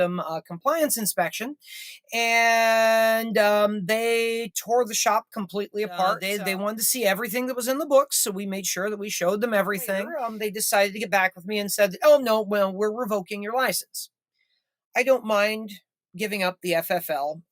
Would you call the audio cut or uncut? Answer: cut